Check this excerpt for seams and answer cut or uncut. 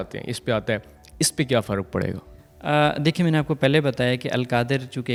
uncut